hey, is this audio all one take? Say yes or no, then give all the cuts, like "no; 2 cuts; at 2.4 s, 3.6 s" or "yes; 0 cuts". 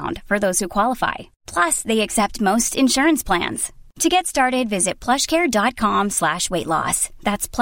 yes; 0 cuts